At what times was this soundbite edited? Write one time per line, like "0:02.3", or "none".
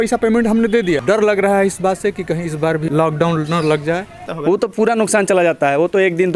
0:01.0
0:02.9
0:04.3